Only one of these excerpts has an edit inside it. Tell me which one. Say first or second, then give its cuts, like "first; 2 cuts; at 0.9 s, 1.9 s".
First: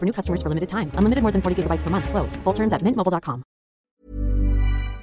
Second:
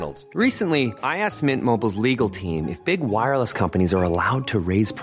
first; 1 cut; at 3.8 s